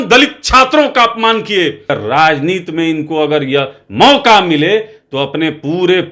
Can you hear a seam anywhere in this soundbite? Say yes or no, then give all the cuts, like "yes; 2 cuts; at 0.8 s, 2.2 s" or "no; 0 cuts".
yes; 1 cut; at 1.9 s